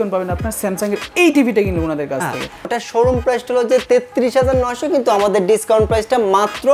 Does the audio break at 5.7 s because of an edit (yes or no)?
no